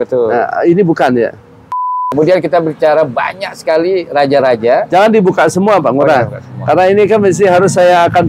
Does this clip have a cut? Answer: yes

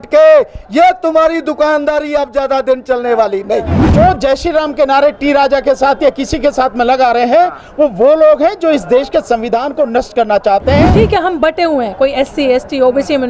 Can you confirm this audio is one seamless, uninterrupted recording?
no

